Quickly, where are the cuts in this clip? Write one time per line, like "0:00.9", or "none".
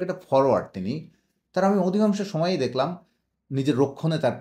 none